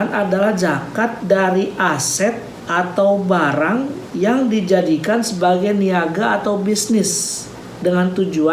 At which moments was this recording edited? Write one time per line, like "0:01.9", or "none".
0:02.5
0:04.0

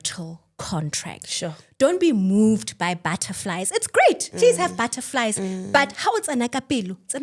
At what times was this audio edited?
none

